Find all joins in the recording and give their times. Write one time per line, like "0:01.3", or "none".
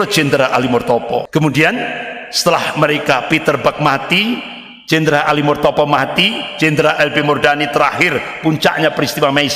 0:01.3